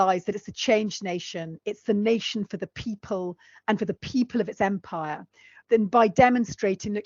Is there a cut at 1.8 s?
no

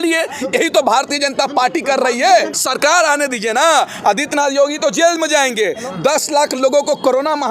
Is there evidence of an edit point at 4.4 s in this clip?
no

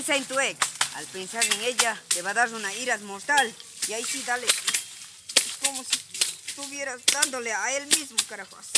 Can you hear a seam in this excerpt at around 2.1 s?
yes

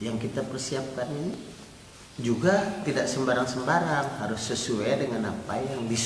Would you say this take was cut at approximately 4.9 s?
no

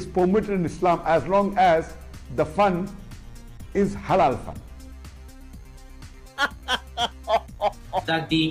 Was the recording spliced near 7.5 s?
yes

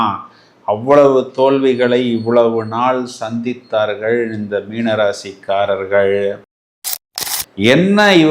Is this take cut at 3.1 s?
no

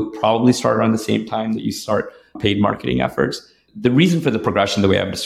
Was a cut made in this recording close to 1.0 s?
no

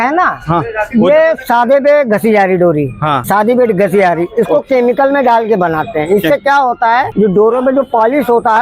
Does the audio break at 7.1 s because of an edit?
yes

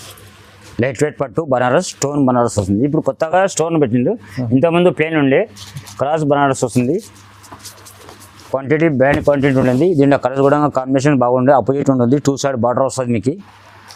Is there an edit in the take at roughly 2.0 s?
no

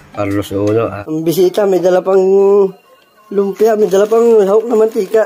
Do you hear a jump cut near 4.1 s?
no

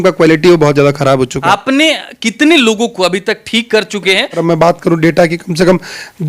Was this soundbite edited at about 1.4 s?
yes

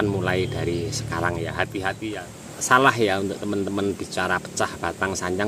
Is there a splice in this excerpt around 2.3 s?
yes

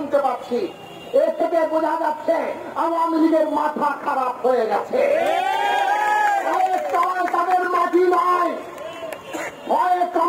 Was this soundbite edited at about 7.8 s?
no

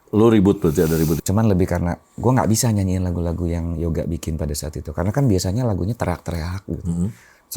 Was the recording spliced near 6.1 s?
no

